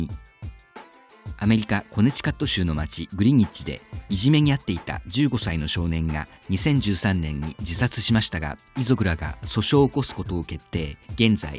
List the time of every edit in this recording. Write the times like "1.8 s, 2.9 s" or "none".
none